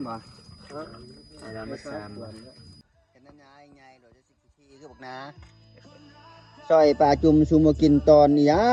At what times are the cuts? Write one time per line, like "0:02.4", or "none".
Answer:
0:02.8